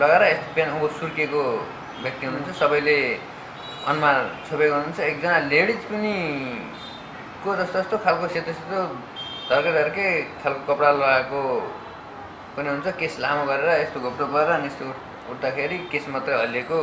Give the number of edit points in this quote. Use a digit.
0